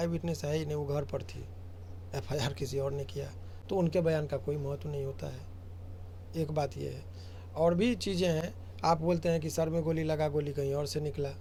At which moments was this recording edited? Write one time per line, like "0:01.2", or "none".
none